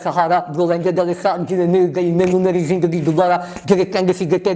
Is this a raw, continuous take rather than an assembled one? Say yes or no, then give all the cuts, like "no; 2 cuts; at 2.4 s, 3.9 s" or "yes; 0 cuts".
yes; 0 cuts